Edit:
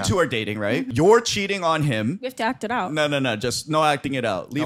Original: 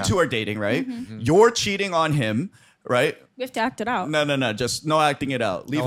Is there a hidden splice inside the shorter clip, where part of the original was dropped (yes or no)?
yes